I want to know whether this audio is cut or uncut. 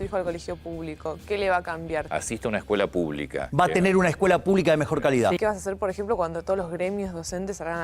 cut